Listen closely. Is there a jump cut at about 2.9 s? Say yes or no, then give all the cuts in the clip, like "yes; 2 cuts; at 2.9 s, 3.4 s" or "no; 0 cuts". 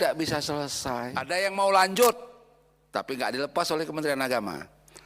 no; 1 cut; at 1.3 s